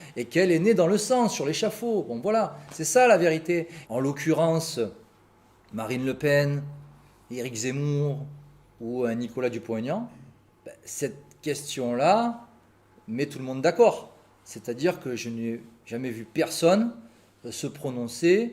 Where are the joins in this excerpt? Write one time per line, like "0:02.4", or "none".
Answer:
0:03.8